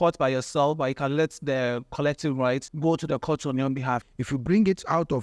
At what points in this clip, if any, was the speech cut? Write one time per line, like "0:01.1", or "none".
0:02.7
0:04.1

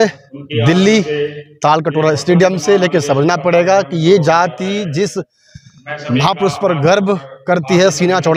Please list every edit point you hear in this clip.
none

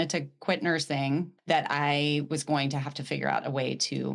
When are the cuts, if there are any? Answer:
0:01.3

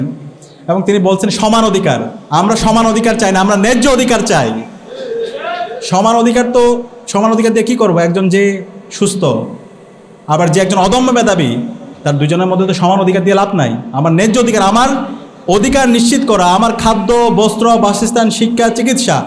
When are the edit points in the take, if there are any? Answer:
0:02.1

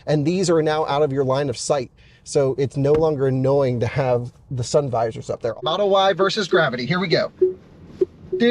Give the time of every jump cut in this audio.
0:05.7

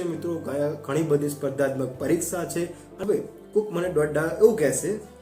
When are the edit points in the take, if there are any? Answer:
0:02.8

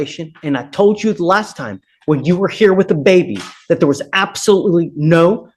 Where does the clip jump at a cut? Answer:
none

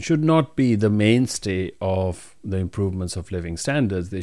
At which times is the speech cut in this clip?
none

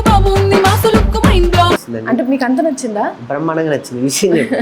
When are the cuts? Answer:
0:01.9

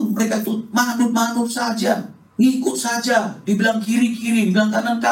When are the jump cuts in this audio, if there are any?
0:02.2

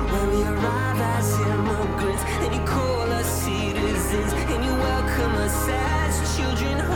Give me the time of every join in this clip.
none

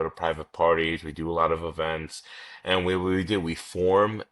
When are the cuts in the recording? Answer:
none

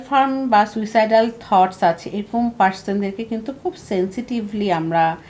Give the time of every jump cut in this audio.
none

